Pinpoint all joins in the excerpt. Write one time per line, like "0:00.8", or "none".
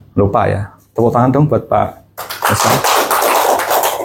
none